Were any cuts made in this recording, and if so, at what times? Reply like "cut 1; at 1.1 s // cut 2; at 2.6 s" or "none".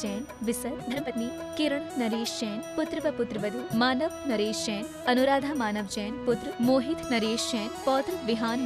cut 1; at 1.0 s